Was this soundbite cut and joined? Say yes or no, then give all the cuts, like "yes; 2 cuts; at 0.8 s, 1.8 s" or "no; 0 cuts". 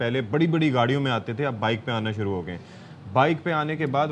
no; 0 cuts